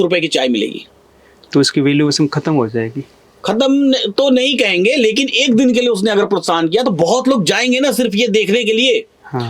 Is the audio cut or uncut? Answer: uncut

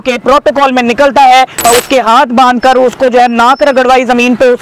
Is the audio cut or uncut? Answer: cut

